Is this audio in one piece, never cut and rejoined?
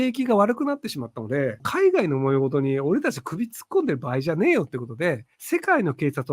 no; 2 cuts; at 1.7 s, 5.3 s

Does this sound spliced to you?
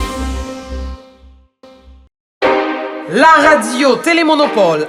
yes; 1 cut; at 1.8 s

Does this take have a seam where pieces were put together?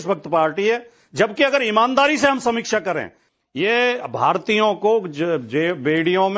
yes; 1 cut; at 3.2 s

